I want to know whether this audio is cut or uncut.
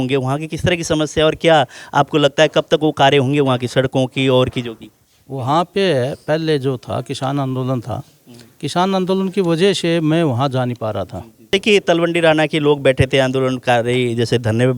cut